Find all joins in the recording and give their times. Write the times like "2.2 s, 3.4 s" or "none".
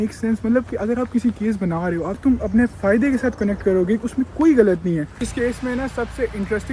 2.2 s, 5.2 s